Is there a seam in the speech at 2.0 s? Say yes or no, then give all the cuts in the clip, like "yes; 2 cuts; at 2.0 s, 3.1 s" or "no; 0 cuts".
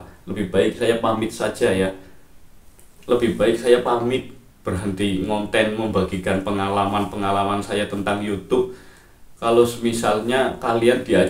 no; 0 cuts